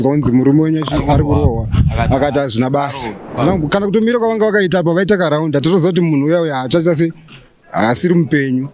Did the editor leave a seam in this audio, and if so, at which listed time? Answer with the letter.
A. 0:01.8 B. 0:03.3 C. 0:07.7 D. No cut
B